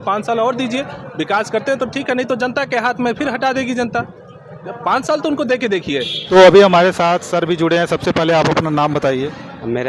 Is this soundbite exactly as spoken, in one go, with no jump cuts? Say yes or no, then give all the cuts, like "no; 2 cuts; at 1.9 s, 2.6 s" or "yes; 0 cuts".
yes; 0 cuts